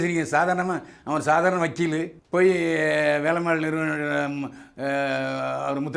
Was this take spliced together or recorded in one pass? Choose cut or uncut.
cut